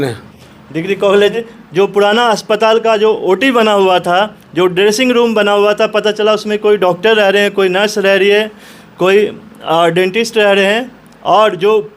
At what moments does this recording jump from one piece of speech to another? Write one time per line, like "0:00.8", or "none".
0:01.2